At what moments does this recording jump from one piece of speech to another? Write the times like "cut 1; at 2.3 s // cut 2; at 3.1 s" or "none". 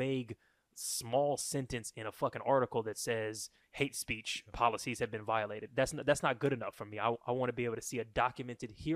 cut 1; at 3.6 s